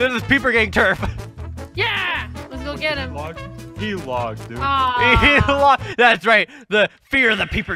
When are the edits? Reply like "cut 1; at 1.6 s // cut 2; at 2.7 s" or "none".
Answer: none